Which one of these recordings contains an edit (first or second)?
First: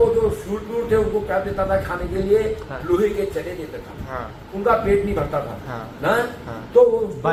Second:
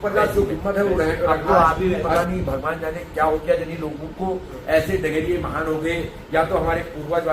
second